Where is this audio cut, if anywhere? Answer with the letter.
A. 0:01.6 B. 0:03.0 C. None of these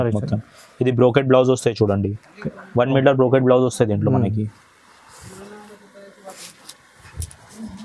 C